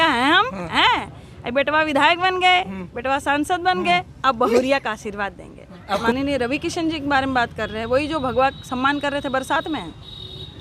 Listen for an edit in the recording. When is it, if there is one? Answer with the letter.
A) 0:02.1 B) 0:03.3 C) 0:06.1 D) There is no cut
C